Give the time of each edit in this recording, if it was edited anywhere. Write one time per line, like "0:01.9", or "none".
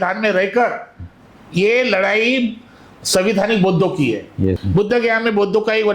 0:04.6